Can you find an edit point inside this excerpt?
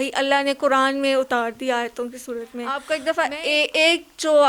yes; 1 cut; at 2.8 s

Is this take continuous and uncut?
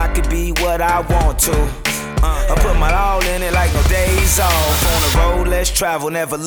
yes; 0 cuts

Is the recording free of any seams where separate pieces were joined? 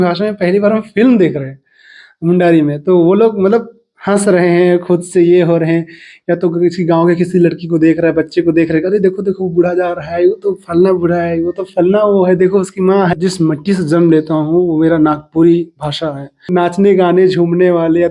no; 2 cuts; at 13.1 s, 16.5 s

